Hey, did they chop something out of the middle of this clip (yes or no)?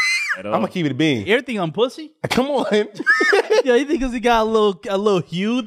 yes